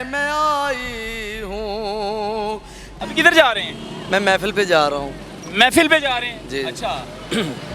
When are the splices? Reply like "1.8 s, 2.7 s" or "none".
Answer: 2.8 s